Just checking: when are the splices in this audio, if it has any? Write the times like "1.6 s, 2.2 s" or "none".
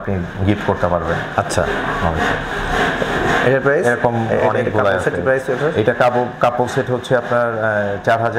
none